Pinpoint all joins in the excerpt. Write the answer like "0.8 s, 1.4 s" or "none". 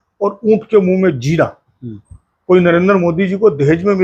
none